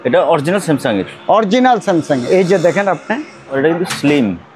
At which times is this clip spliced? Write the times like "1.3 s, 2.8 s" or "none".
3.5 s

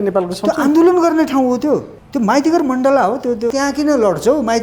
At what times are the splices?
2.0 s, 3.5 s

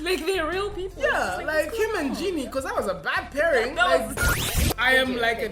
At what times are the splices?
4.5 s

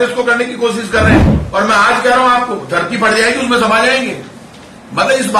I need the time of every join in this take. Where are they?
1.4 s

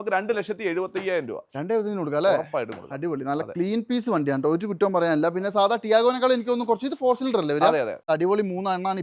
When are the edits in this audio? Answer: 8.0 s

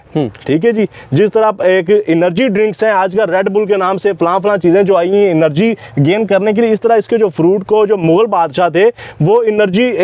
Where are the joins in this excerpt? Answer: none

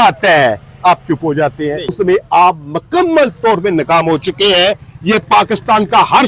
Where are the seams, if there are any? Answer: 1.9 s

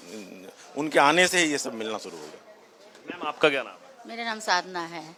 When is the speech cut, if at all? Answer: none

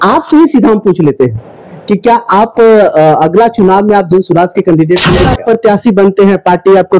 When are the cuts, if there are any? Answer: 5.3 s

